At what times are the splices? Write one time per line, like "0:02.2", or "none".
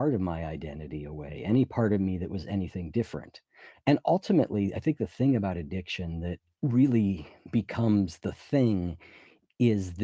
0:06.4
0:07.3